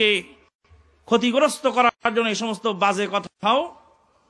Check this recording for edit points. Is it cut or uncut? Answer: uncut